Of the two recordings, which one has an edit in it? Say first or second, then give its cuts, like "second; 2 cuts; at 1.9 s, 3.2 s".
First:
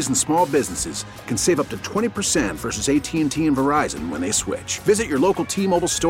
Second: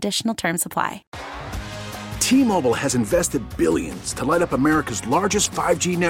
second; 1 cut; at 1.1 s